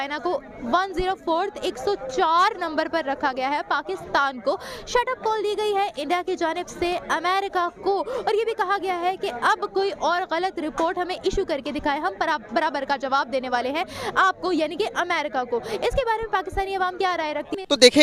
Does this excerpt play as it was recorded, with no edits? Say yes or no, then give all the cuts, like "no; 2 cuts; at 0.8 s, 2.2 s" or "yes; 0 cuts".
yes; 0 cuts